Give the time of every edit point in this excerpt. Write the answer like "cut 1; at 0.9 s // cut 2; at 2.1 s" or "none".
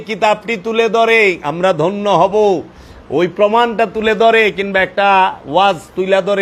none